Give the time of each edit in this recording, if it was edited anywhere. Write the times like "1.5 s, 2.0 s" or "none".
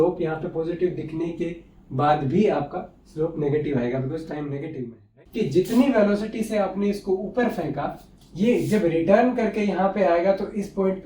5.1 s